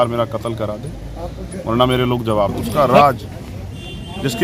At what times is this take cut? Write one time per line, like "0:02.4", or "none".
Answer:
0:02.4

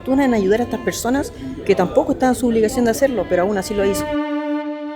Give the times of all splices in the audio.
0:04.0

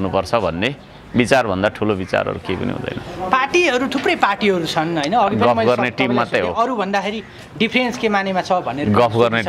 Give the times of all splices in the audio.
none

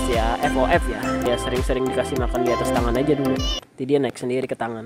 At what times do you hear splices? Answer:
0:01.3
0:03.5

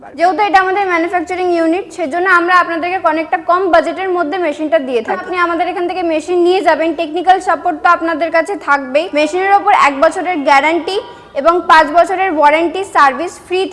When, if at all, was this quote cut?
0:05.2
0:09.1

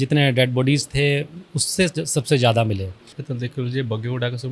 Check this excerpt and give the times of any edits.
0:03.2

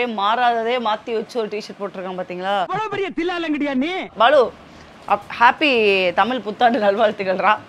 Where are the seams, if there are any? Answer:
none

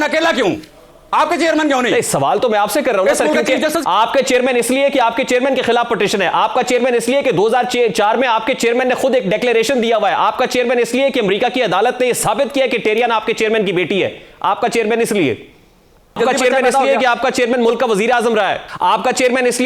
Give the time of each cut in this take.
0:16.2
0:18.7

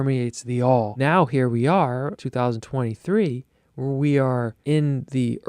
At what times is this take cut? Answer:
0:00.9
0:02.2
0:04.5

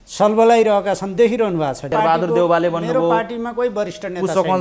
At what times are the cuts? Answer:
0:01.9

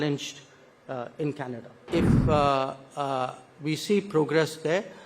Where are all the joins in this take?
0:01.8

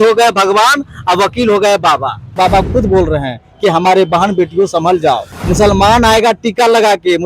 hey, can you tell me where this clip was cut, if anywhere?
0:02.3
0:05.4

